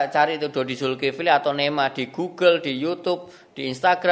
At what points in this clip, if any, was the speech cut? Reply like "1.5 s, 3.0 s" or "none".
none